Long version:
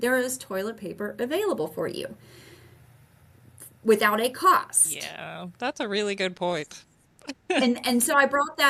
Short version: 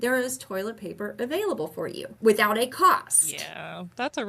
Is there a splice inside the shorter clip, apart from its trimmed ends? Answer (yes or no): yes